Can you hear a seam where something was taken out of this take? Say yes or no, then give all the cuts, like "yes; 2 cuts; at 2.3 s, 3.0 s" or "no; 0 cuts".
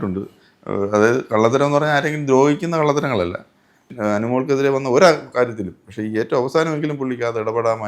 yes; 1 cut; at 3.9 s